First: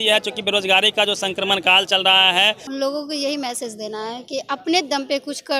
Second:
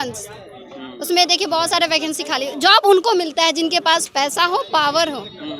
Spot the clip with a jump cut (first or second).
first